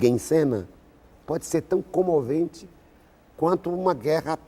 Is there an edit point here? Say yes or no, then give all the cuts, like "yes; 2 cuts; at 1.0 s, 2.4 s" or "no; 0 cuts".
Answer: no; 0 cuts